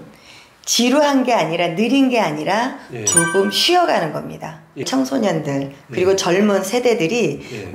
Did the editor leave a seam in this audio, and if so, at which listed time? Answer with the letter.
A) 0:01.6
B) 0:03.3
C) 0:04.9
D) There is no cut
C